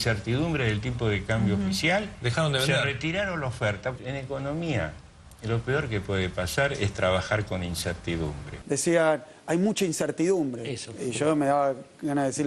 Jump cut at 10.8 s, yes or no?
yes